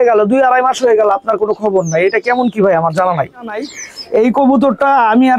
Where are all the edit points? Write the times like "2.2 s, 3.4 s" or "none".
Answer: 3.7 s